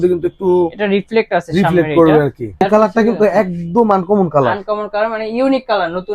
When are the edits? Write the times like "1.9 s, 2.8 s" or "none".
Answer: 2.6 s